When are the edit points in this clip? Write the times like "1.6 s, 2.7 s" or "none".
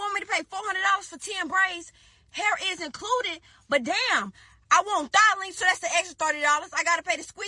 none